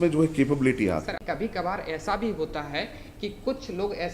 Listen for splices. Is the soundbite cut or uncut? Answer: cut